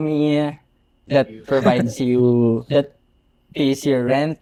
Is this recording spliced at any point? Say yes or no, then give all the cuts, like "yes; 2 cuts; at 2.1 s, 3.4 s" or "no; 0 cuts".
no; 0 cuts